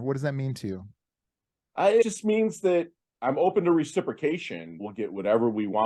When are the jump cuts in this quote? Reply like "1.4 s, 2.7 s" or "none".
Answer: 2.0 s, 4.8 s